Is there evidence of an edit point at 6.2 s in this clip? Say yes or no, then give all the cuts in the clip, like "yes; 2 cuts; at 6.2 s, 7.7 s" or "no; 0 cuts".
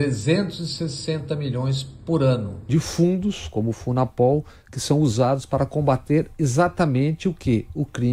no; 1 cut; at 2.5 s